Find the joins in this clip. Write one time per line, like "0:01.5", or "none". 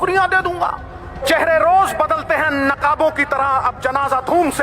0:01.2